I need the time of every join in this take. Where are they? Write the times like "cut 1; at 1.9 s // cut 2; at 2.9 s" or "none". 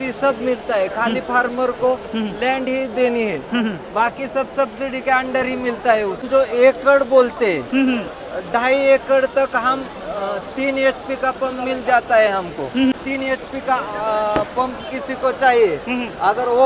cut 1; at 6.2 s // cut 2; at 12.9 s